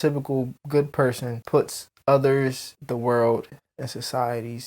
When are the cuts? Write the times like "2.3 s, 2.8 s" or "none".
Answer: 1.3 s

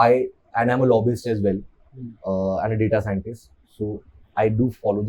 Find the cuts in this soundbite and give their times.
none

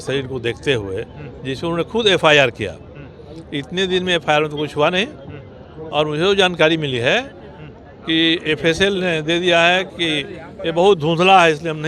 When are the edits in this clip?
none

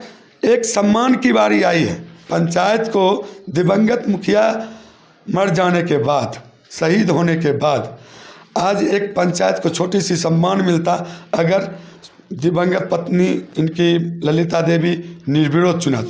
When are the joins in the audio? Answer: none

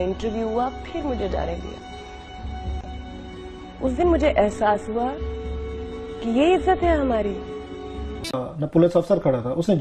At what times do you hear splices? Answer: 8.4 s

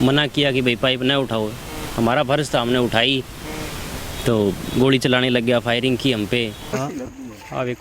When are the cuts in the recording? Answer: 6.7 s

